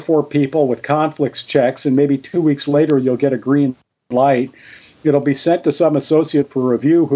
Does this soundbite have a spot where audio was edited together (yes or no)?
no